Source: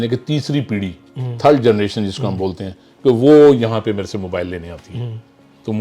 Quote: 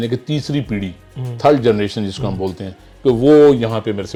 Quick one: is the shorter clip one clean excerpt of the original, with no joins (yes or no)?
yes